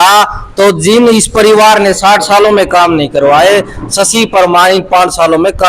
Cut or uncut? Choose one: uncut